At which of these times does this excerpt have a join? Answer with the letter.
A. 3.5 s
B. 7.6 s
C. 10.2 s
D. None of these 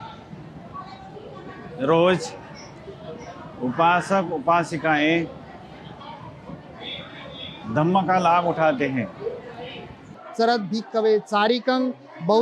C